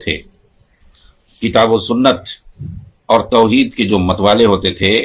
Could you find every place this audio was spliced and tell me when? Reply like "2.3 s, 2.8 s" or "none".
none